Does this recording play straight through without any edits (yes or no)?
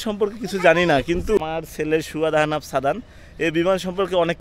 no